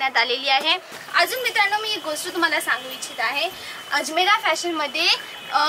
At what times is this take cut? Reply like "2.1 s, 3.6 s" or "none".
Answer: 0.9 s